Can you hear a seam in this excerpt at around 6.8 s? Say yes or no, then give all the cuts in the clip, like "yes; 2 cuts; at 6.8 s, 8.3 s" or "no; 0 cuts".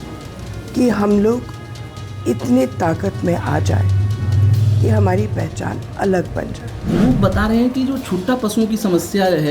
yes; 1 cut; at 6.8 s